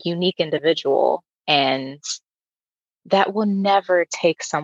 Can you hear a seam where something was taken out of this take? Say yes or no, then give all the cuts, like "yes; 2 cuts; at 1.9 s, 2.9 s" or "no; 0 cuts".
no; 0 cuts